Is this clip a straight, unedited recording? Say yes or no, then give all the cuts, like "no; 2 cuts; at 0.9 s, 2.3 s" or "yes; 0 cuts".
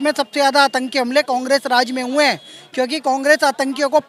yes; 0 cuts